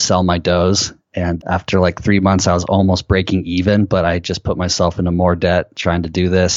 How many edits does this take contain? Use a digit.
1